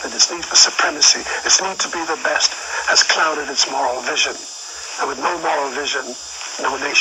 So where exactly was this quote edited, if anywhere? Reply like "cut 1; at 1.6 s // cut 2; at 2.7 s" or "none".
none